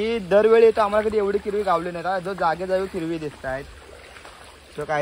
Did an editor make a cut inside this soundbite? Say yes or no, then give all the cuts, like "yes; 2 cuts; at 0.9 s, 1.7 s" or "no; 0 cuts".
no; 0 cuts